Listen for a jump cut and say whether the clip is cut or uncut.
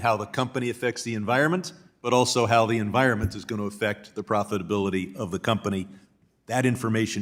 uncut